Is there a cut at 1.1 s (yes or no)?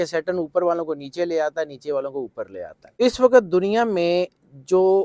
no